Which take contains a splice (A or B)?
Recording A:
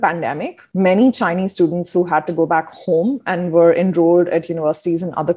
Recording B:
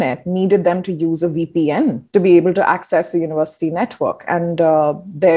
B